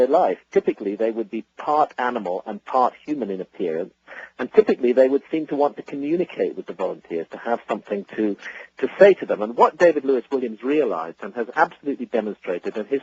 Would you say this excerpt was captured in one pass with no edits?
no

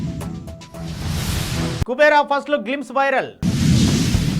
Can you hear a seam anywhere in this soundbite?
yes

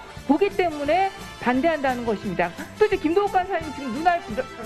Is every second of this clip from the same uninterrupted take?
no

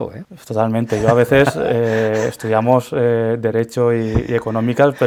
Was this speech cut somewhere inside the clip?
no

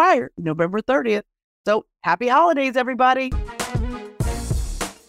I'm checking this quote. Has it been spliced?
yes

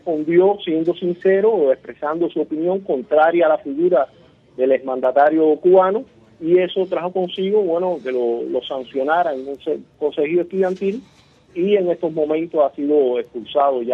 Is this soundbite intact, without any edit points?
no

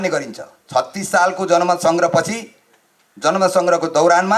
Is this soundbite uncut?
yes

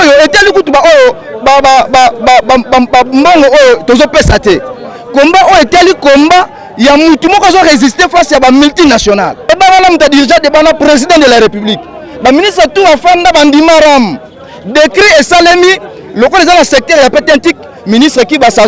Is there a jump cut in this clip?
yes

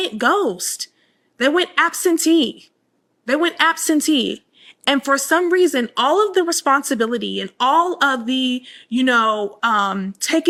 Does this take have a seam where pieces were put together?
no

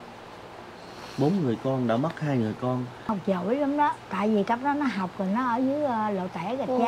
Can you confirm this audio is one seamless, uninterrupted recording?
no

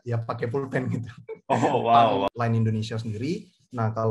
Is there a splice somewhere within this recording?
yes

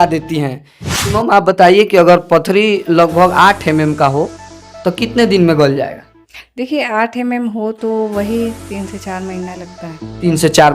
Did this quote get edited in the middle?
yes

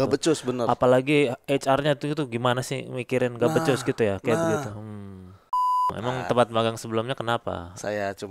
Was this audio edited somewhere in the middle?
yes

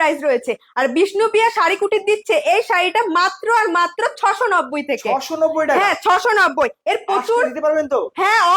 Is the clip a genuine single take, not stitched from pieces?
yes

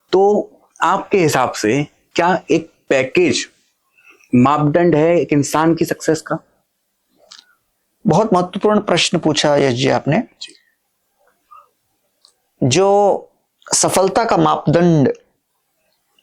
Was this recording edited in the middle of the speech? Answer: no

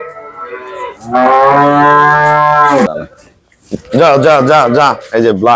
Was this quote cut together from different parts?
yes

